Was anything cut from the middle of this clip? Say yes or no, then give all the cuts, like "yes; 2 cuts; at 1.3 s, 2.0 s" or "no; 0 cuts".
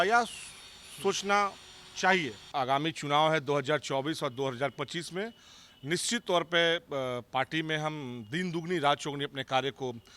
yes; 1 cut; at 2.4 s